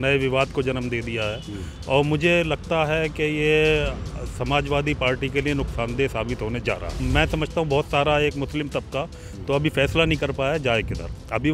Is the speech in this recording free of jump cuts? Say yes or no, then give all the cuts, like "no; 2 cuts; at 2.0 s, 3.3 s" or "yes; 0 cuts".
no; 1 cut; at 6.9 s